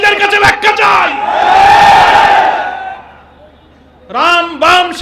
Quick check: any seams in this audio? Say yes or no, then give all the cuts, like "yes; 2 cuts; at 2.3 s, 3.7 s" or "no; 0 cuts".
no; 0 cuts